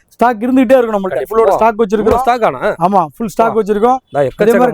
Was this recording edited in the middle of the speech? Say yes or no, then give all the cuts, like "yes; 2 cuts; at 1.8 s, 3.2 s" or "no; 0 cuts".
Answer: yes; 1 cut; at 1.3 s